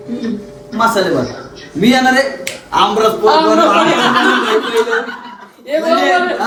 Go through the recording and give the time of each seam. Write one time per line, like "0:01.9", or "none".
none